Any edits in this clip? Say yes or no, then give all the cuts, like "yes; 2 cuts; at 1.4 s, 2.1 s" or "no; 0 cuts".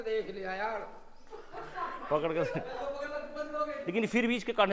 yes; 1 cut; at 3.8 s